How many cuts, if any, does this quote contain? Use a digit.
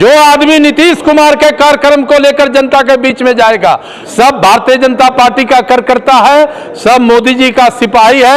1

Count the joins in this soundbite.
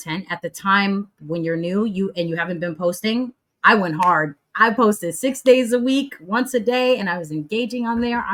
0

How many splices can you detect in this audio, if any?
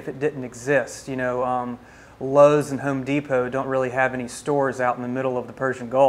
0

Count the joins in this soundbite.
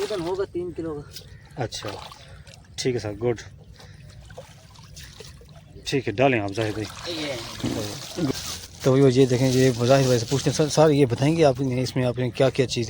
1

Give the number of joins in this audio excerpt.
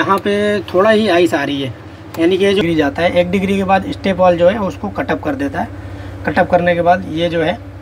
1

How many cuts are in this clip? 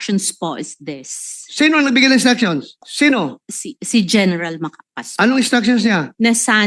1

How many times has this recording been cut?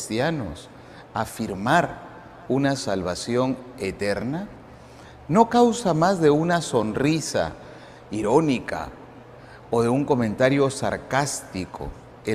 1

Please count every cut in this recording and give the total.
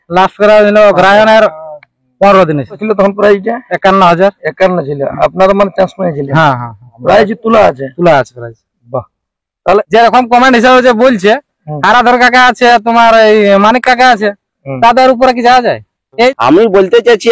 3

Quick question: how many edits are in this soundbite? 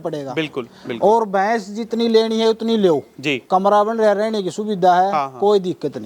1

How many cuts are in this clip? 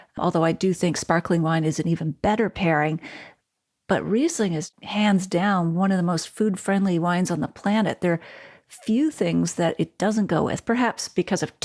1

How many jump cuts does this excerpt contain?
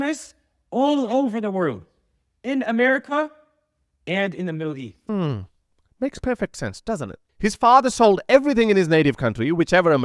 2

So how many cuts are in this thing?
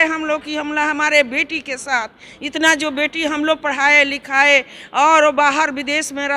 0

